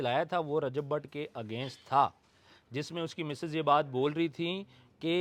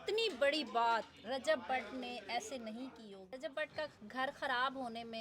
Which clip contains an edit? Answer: second; 1 cut; at 3.3 s

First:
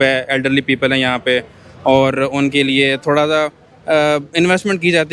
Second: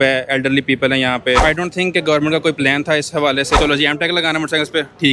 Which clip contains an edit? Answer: second; 2 cuts; at 1.4 s, 3.5 s

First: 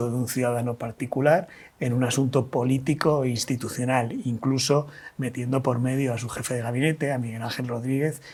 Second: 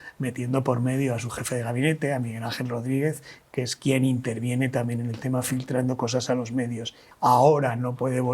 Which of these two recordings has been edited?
second; 1 cut; at 7.0 s

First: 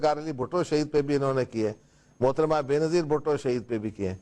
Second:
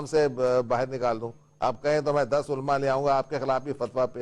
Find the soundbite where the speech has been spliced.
second; 1 cut; at 3.3 s

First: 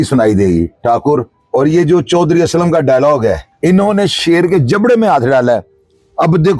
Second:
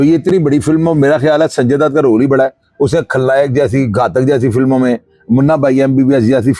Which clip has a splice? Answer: first; 2 cuts; at 1.4 s, 3.5 s

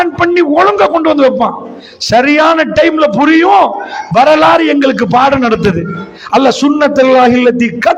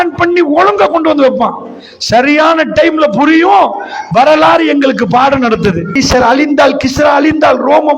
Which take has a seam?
second; 1 cut; at 6.0 s

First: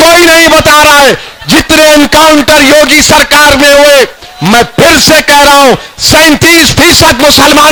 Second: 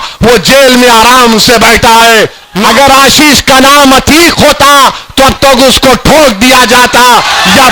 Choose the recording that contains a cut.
second; 1 cut; at 2.5 s

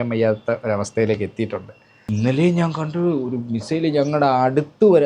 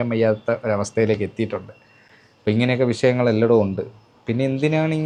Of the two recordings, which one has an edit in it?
first; 1 cut; at 2.0 s

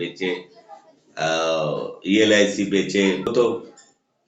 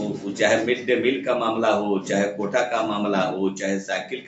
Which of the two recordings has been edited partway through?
first; 1 cut; at 3.3 s

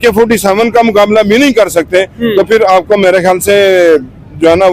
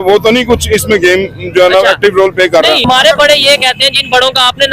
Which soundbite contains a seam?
second; 1 cut; at 2.8 s

